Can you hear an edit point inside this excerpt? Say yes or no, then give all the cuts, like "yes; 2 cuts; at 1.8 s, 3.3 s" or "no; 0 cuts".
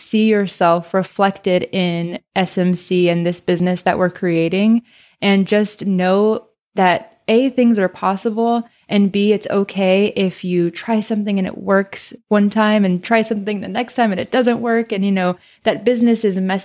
no; 0 cuts